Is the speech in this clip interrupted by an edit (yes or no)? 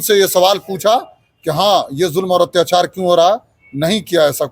no